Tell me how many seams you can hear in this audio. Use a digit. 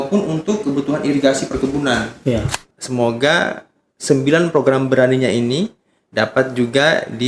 1